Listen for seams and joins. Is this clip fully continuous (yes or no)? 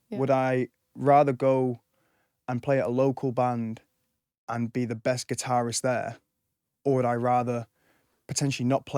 yes